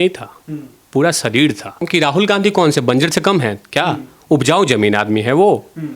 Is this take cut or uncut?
cut